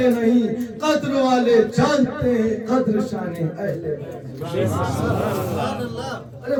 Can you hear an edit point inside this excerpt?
no; 0 cuts

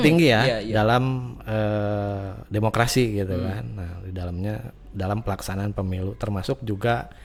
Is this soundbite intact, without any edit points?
yes; 0 cuts

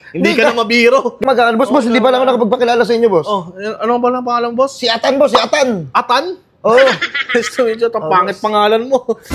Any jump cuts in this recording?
yes; 1 cut; at 1.2 s

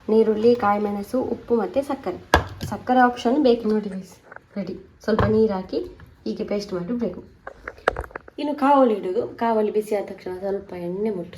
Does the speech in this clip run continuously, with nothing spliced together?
no; 1 cut; at 3.6 s

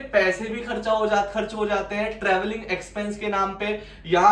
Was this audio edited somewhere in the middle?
no; 0 cuts

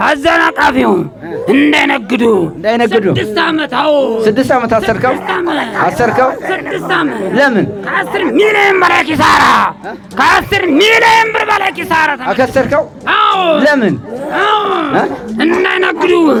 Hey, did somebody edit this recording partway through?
no; 0 cuts

